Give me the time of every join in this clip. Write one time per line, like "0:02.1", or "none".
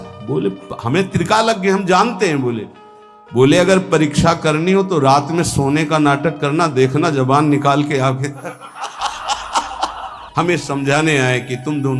0:10.2